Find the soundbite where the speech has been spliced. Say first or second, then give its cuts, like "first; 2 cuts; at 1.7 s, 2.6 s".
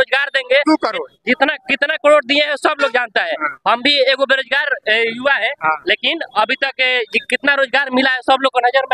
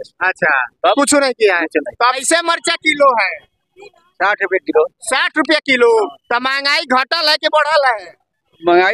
second; 1 cut; at 2.2 s